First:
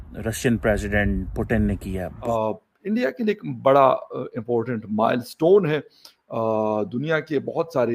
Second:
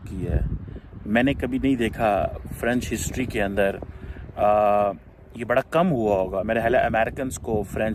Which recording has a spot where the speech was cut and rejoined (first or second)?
first